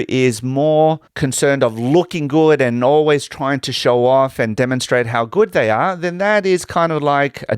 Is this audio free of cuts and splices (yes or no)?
no